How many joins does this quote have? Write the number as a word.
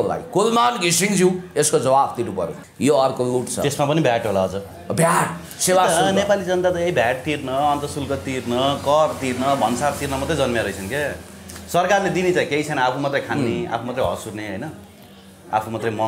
one